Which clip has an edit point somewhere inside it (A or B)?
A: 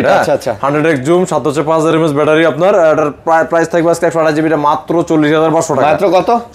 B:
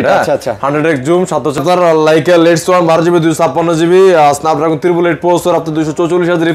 B